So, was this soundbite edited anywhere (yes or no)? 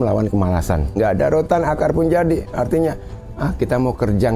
no